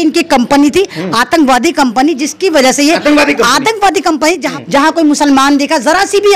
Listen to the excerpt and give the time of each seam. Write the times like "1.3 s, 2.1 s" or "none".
4.5 s